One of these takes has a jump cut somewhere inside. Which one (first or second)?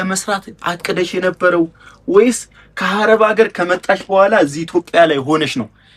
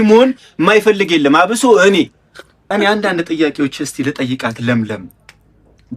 second